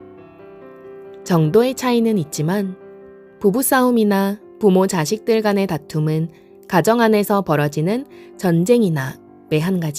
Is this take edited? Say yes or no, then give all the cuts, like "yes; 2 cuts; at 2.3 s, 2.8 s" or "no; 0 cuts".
yes; 1 cut; at 1.3 s